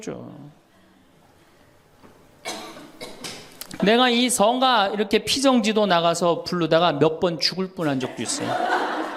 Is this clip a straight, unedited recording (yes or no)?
no